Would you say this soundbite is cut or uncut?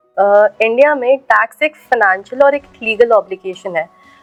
uncut